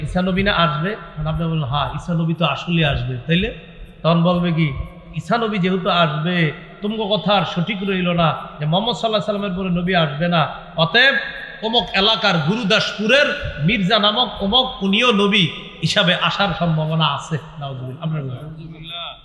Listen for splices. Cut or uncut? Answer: uncut